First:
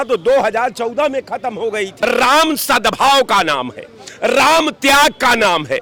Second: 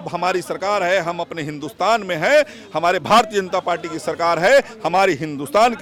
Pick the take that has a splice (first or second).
first